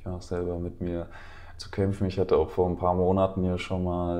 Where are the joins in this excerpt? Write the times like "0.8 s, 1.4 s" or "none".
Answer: none